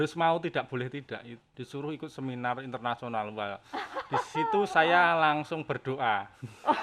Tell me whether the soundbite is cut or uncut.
cut